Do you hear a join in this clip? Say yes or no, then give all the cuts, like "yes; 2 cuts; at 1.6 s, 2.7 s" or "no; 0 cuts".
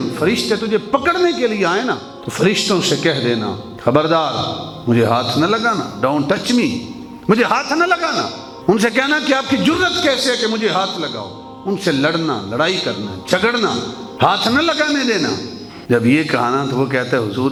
no; 0 cuts